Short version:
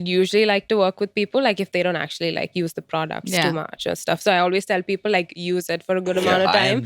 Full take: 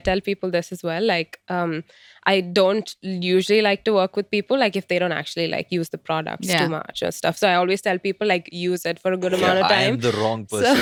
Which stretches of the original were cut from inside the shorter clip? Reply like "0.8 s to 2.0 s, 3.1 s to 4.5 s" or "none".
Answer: none